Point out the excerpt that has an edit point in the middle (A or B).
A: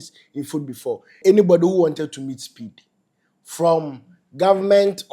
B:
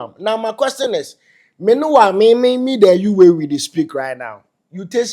A